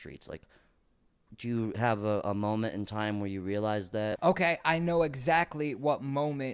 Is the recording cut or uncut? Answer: cut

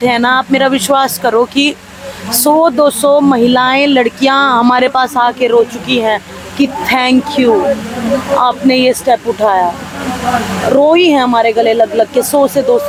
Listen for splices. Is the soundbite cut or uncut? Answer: uncut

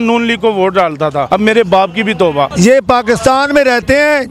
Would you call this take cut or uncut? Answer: cut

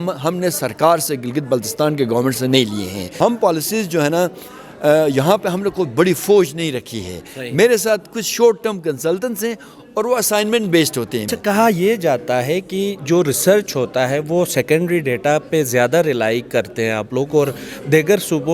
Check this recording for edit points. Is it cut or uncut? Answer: cut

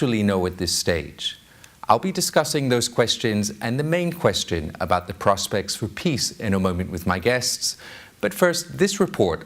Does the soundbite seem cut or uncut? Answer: cut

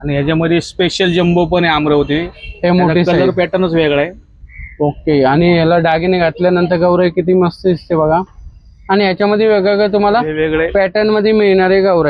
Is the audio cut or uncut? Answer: uncut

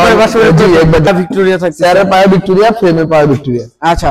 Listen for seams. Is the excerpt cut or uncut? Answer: cut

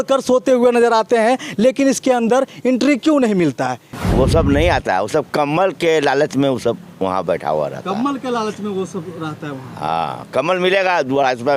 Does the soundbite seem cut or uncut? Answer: cut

